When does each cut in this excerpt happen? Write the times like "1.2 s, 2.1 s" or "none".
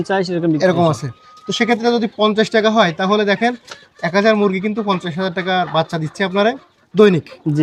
none